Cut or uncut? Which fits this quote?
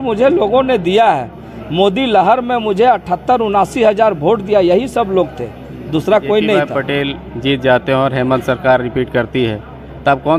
cut